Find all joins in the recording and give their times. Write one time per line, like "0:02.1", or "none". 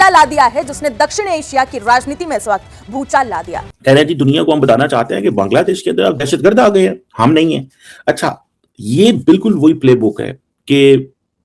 0:03.6